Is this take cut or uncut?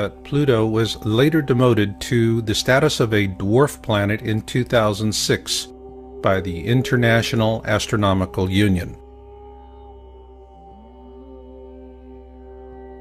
uncut